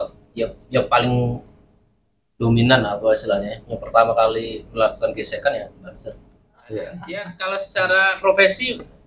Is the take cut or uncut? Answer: cut